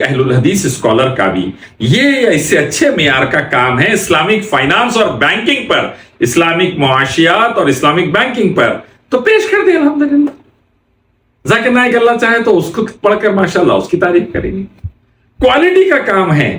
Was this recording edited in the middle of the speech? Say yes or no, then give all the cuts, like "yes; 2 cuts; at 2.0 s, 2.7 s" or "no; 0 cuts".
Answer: no; 0 cuts